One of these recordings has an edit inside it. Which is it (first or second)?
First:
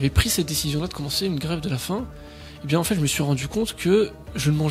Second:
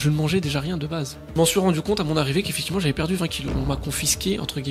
second